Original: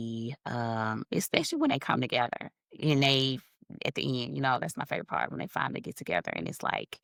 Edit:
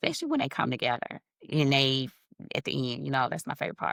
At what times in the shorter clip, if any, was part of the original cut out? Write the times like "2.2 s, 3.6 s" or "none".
none